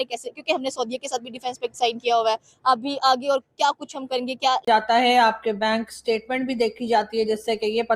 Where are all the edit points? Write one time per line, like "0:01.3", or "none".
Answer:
0:04.6